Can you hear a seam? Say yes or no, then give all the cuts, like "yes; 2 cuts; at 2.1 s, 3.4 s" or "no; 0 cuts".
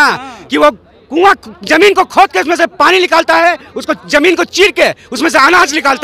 no; 0 cuts